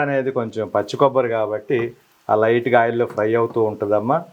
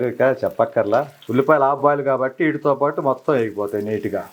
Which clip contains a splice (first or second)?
second